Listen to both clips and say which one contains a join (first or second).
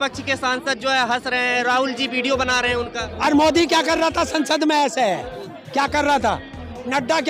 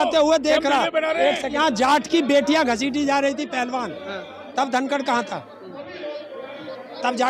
second